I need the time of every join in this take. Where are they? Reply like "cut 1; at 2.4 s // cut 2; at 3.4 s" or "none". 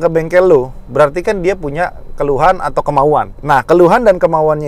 cut 1; at 3.3 s